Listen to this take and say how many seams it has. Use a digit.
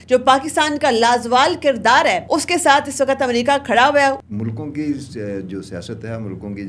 2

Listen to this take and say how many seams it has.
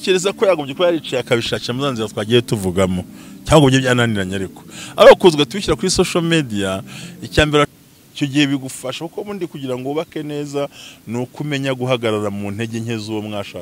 1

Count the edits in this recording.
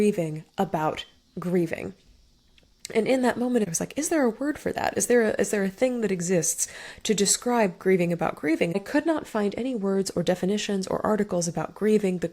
2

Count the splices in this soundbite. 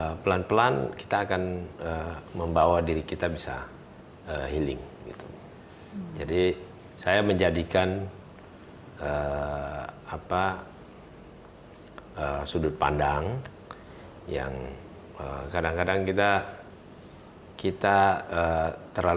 0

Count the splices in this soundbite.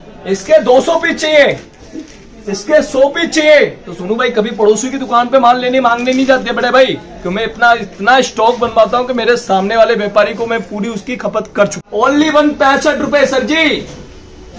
1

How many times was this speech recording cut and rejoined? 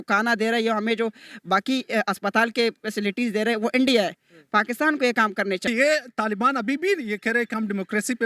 1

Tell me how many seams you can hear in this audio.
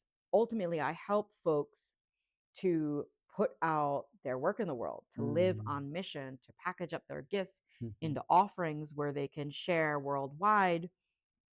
0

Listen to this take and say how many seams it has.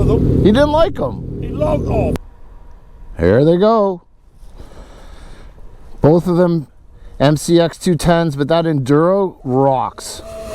1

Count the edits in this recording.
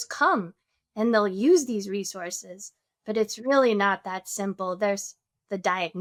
0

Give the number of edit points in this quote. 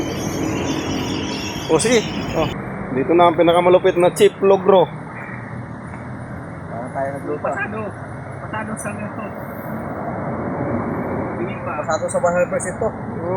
1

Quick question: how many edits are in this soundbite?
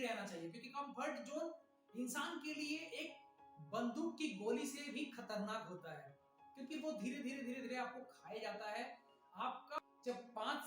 1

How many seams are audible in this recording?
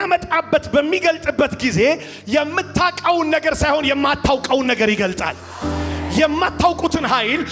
0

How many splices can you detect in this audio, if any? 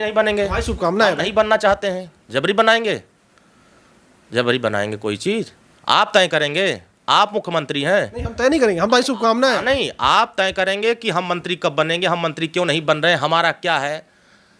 0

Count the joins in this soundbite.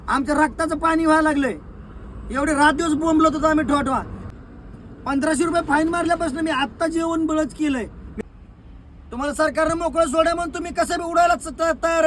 2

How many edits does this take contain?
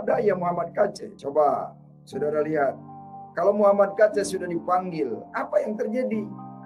1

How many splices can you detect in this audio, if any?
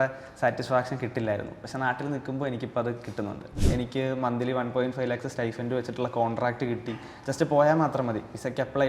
1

